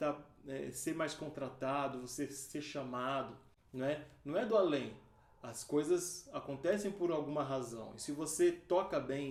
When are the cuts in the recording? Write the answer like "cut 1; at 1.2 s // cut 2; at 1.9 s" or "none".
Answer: none